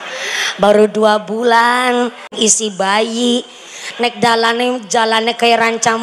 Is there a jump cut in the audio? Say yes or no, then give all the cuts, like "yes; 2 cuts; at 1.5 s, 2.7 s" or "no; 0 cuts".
yes; 1 cut; at 2.3 s